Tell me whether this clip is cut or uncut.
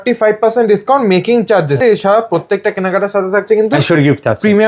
cut